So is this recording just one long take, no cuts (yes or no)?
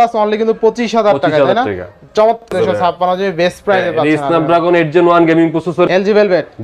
no